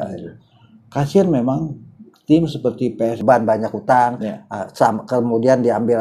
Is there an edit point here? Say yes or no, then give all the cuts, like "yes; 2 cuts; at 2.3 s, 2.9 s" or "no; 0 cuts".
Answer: yes; 1 cut; at 3.2 s